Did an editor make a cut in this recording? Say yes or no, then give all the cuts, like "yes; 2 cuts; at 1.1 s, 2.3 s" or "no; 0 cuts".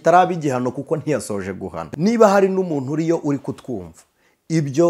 yes; 1 cut; at 1.8 s